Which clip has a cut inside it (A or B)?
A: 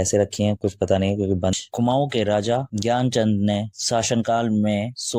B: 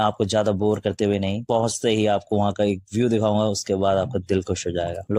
A